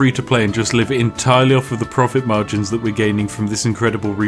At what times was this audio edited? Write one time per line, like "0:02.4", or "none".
none